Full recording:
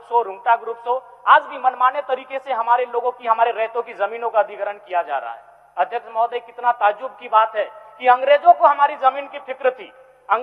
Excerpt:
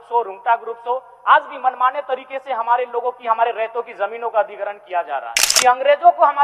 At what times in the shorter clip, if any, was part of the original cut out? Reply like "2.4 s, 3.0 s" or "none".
5.4 s